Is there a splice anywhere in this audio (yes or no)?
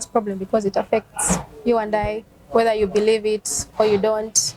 no